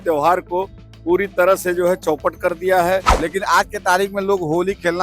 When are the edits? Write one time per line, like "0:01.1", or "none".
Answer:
0:03.1